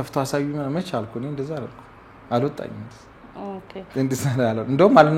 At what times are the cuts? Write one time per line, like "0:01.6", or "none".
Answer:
none